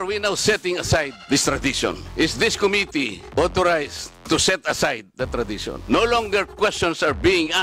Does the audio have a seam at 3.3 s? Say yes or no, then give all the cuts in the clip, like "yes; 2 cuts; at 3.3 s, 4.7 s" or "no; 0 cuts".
no; 2 cuts; at 2.1 s, 5.8 s